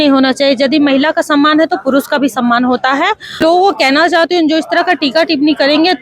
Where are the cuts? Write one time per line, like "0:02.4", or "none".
0:03.4